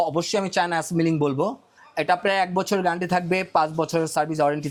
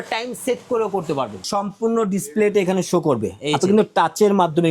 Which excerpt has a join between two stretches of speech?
second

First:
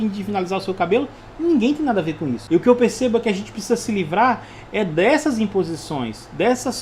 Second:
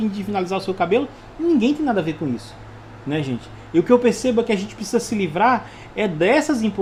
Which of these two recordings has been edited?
first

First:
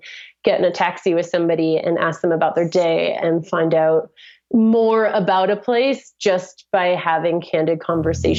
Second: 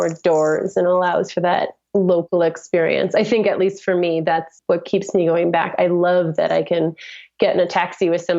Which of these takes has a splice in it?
second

